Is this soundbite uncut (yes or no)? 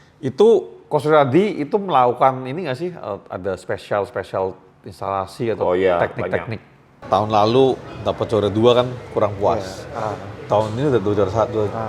no